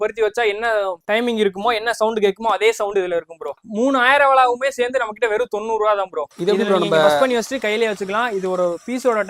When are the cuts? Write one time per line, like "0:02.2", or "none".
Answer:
0:03.5
0:06.3